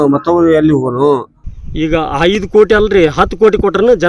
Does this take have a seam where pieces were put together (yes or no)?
yes